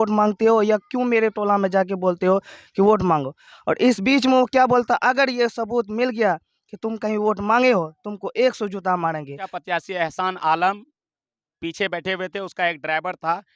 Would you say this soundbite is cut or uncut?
cut